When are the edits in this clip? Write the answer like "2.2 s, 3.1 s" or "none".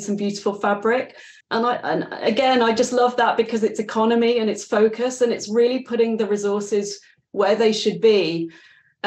1.4 s